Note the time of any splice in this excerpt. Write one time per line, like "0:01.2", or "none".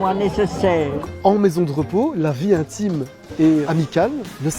0:01.0
0:03.7